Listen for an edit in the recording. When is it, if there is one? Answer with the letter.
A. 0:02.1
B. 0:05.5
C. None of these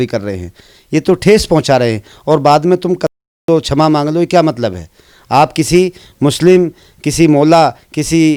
C